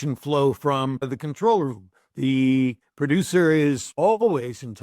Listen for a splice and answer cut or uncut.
cut